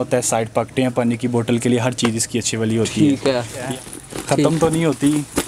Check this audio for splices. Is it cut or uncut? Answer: cut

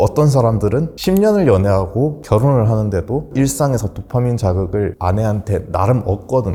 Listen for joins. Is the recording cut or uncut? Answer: uncut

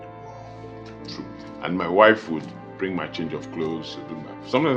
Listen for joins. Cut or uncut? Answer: uncut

